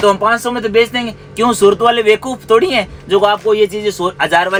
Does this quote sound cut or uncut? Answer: uncut